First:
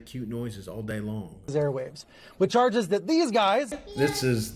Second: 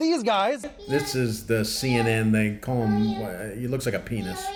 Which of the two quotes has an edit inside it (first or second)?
first